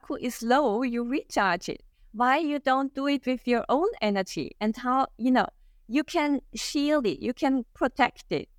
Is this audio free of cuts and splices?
yes; 0 cuts

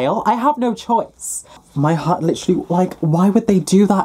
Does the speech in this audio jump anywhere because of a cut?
yes; 1 cut; at 1.6 s

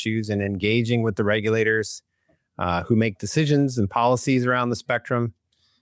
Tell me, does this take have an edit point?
no; 0 cuts

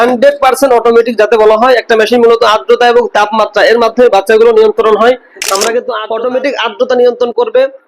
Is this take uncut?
no; 1 cut; at 6.0 s

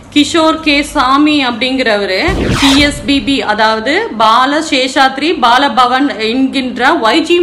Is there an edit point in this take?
yes; 1 cut; at 2.5 s

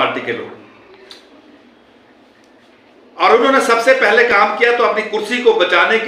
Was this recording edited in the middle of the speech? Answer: no; 0 cuts

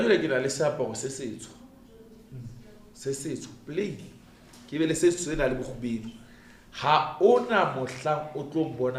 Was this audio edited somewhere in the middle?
no; 0 cuts

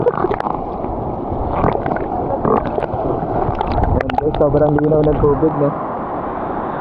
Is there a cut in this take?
no; 0 cuts

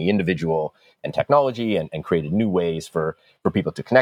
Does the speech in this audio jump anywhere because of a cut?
no; 0 cuts

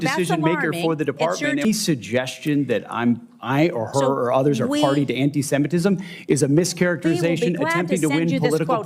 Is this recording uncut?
no; 1 cut; at 1.6 s

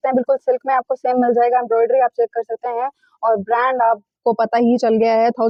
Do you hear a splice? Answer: no; 0 cuts

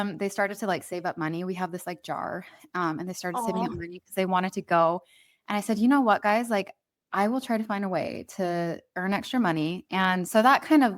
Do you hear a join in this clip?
no; 0 cuts

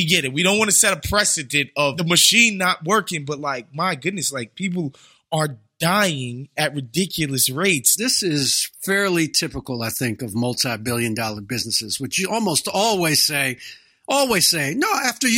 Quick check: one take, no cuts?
no; 2 cuts; at 2.0 s, 8.0 s

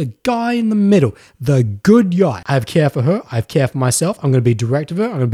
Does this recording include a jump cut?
yes; 1 cut; at 2.4 s

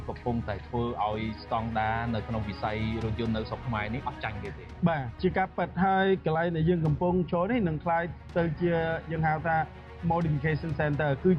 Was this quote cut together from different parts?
no; 0 cuts

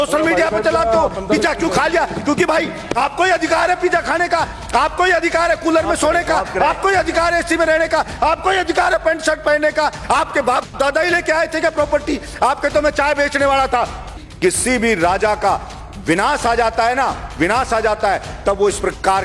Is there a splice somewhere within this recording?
yes; 1 cut; at 14.2 s

